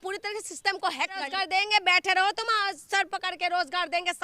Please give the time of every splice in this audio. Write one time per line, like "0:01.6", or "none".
0:01.3